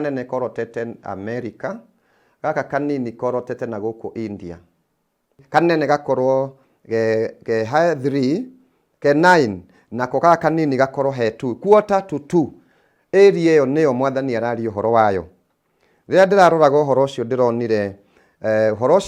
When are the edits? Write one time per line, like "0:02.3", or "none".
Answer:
0:05.4